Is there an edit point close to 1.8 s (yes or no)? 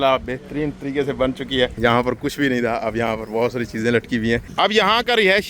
yes